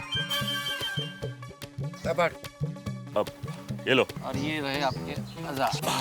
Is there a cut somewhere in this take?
yes; 1 cut; at 4.2 s

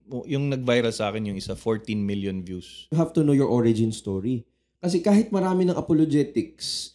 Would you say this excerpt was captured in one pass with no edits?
no; 1 cut; at 2.9 s

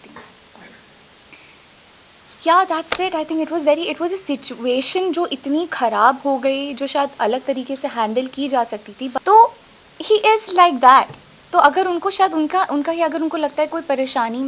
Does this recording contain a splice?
yes; 1 cut; at 9.2 s

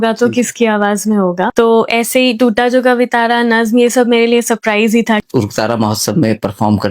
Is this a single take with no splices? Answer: no; 2 cuts; at 1.5 s, 5.2 s

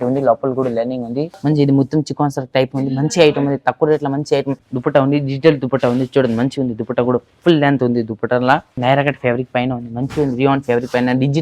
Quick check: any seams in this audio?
yes; 3 cuts; at 1.3 s, 4.6 s, 8.8 s

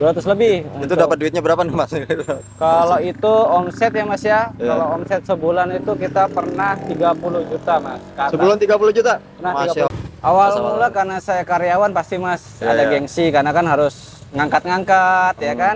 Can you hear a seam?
yes; 1 cut; at 9.9 s

